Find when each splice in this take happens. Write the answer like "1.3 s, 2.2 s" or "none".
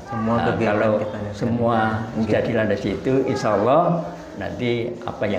none